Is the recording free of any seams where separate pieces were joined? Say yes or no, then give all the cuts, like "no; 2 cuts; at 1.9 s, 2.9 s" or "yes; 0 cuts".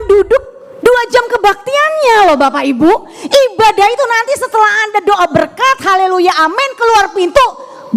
yes; 0 cuts